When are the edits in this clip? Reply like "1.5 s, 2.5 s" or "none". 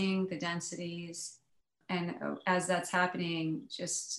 1.8 s

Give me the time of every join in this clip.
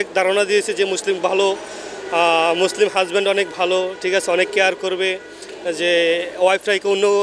none

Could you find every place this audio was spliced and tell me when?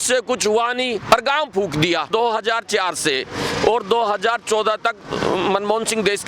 2.1 s

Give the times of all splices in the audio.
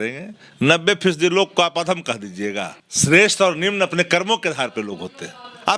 2.8 s

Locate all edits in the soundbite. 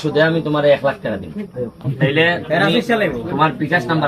1.8 s

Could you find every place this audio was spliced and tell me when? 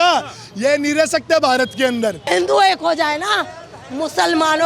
2.3 s

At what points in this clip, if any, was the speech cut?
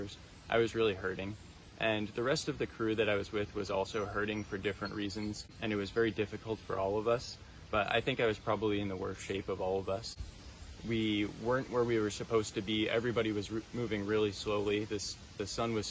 5.5 s, 10.2 s

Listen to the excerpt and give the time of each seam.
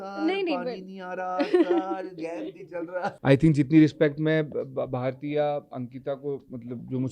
3.1 s

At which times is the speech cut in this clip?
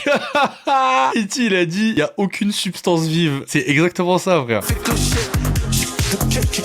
1.1 s, 3.4 s, 4.7 s

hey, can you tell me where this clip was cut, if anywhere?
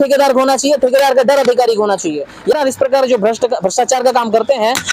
2.6 s

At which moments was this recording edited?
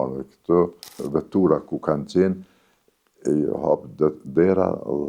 1.0 s

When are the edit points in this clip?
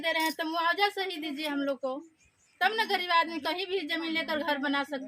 none

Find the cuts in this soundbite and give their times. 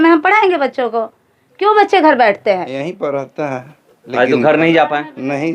2.7 s

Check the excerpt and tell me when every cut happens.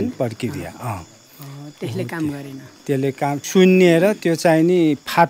3.4 s

